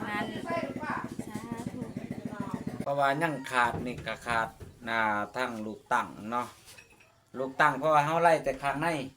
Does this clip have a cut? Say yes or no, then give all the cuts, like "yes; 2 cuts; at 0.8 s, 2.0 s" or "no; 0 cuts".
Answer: yes; 1 cut; at 2.8 s